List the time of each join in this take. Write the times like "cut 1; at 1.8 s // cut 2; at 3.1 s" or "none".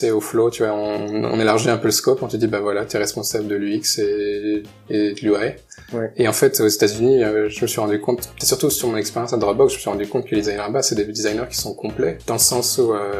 cut 1; at 8.4 s